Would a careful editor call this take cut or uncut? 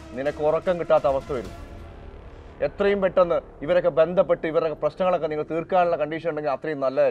uncut